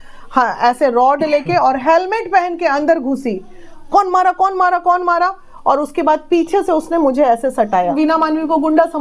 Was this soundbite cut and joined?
yes; 1 cut; at 7.9 s

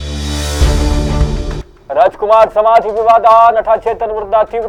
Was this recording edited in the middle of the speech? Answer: no; 0 cuts

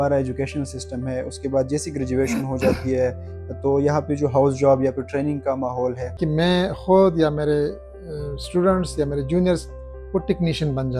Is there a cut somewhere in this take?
yes; 1 cut; at 6.2 s

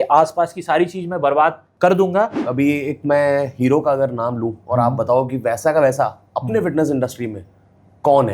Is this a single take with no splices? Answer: no; 2 cuts; at 1.7 s, 2.4 s

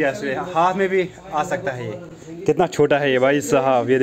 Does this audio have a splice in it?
no; 0 cuts

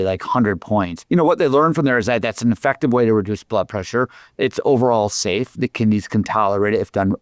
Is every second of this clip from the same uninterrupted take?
no; 2 cuts; at 1.0 s, 5.5 s

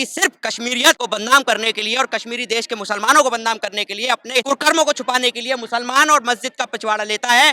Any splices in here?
yes; 2 cuts; at 1.0 s, 4.4 s

